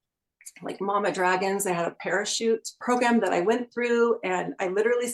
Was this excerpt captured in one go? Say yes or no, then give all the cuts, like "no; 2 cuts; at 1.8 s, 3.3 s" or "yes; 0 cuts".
no; 1 cut; at 2.7 s